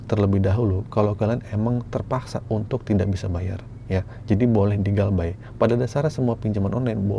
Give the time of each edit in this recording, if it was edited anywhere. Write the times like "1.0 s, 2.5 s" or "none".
none